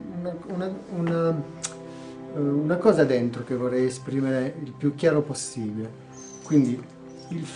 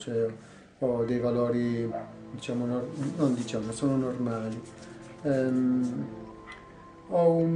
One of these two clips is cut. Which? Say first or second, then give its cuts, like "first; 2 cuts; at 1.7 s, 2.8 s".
second; 1 cut; at 1.7 s